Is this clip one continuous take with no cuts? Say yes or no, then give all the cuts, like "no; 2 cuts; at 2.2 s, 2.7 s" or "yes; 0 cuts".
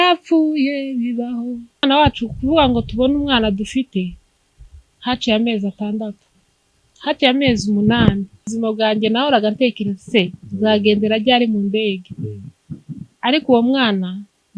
no; 2 cuts; at 1.8 s, 8.5 s